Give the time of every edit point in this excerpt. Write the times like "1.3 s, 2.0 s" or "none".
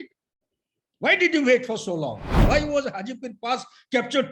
2.4 s